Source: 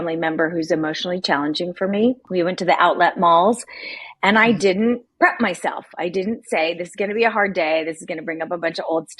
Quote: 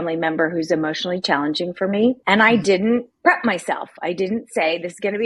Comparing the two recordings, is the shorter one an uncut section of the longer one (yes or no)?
no